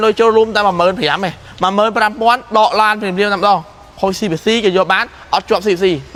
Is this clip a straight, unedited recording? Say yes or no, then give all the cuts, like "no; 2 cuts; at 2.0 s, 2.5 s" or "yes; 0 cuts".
yes; 0 cuts